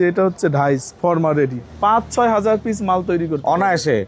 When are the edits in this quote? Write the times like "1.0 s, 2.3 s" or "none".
1.7 s